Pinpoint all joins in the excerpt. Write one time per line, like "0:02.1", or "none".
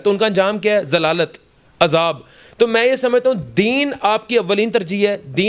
none